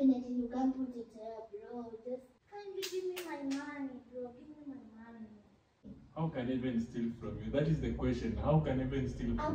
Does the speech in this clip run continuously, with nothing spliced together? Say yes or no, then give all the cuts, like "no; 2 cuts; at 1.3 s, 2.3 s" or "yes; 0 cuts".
no; 2 cuts; at 2.4 s, 6.0 s